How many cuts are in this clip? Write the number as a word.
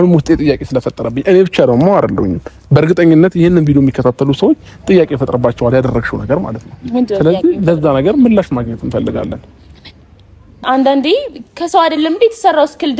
one